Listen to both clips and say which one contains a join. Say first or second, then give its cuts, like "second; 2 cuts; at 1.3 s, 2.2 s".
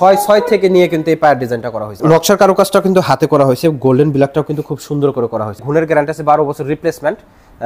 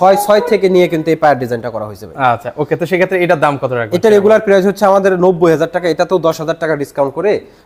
first; 2 cuts; at 2.0 s, 5.6 s